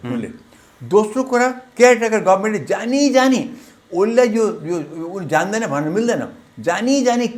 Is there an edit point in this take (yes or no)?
no